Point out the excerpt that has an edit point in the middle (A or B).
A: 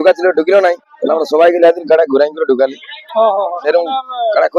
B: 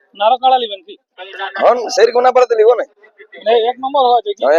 A